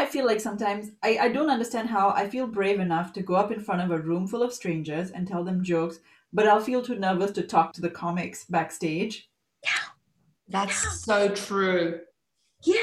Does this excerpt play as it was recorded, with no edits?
yes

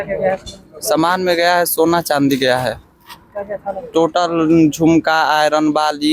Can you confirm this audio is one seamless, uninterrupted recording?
yes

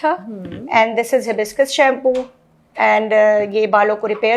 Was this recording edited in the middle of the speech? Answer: no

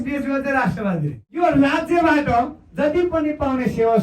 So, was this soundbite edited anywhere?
yes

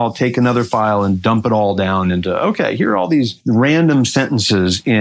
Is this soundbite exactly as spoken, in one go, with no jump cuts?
no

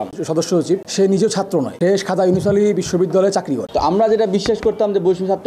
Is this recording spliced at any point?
yes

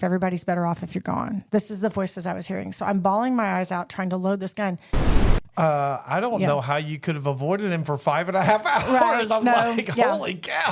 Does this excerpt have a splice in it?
yes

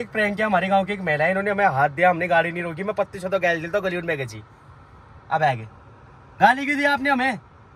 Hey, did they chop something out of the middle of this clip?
no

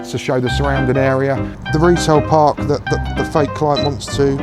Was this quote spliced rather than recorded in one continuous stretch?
yes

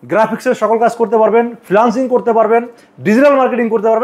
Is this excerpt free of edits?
yes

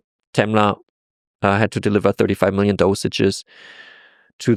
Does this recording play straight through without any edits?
yes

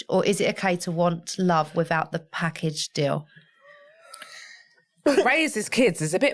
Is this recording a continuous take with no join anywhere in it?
yes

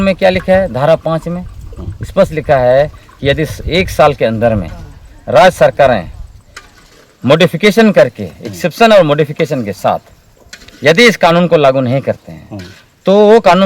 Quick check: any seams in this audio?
no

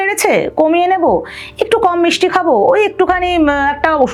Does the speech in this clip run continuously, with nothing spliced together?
yes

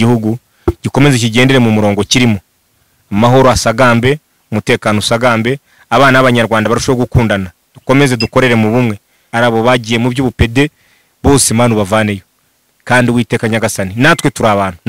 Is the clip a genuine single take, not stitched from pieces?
no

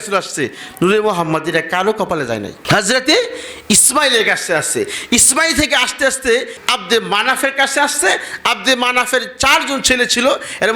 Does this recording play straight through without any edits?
no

